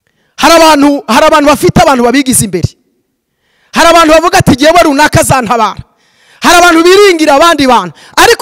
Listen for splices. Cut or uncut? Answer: uncut